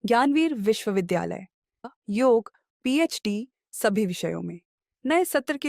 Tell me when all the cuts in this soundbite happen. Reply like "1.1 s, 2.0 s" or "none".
1.8 s